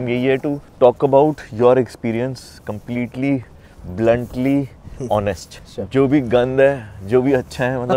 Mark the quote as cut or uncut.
uncut